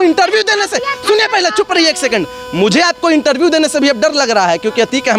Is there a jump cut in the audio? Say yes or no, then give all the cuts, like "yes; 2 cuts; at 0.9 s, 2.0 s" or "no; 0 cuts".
no; 0 cuts